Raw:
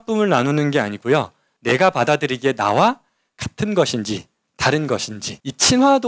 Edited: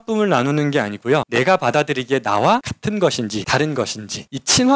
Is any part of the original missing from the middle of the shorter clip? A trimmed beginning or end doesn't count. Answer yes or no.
yes